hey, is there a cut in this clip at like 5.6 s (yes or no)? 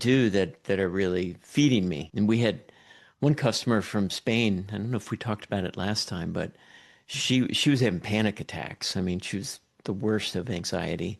no